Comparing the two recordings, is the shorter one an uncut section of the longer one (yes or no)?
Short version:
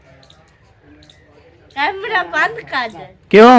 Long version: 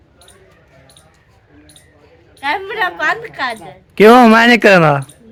yes